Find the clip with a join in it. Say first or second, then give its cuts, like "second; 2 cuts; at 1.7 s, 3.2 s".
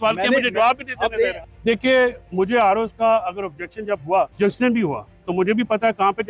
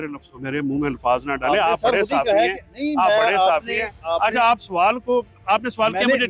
first; 2 cuts; at 1.5 s, 4.3 s